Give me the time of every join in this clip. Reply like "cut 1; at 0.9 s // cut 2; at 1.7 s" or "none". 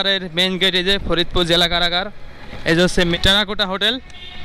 cut 1; at 3.1 s

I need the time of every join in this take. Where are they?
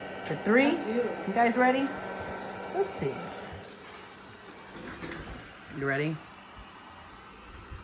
none

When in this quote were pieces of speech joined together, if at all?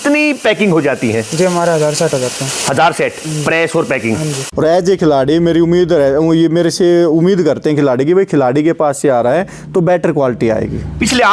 cut 1; at 4.4 s

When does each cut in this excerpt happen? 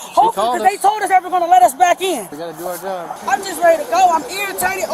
cut 1; at 2.7 s

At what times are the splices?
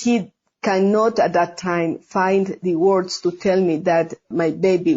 none

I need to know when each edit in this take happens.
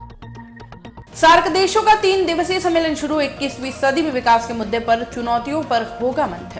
none

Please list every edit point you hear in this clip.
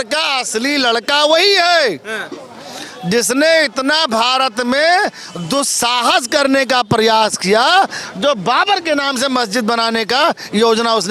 none

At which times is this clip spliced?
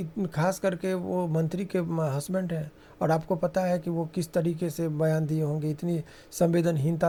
none

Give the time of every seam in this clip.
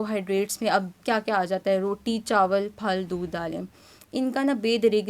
none

